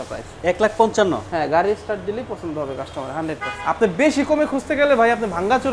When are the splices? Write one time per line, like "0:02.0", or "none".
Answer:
0:03.5